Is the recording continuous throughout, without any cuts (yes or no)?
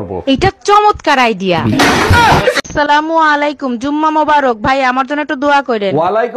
no